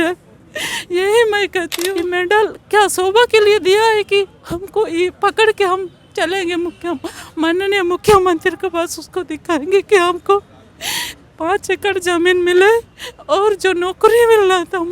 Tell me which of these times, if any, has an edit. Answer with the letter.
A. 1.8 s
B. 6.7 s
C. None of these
A